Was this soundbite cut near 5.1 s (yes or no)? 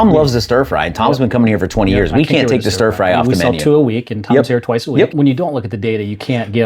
yes